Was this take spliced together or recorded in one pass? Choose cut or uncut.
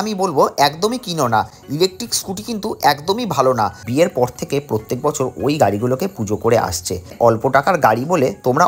cut